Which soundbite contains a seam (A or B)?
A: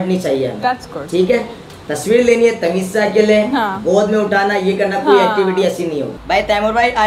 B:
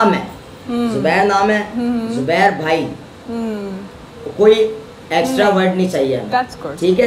A